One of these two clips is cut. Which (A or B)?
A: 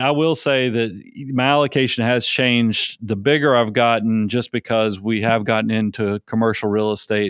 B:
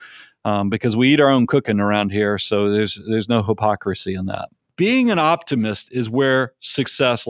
B